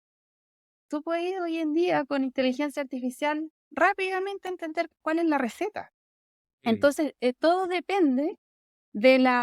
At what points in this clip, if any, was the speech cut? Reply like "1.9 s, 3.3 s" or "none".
4.9 s